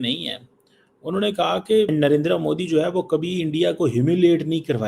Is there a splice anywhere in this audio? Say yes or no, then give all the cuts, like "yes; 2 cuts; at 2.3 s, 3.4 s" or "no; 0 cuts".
yes; 1 cut; at 1.9 s